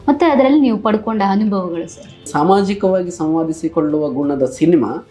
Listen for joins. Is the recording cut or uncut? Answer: cut